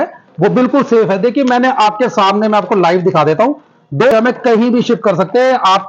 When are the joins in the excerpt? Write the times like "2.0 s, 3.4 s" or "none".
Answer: 4.1 s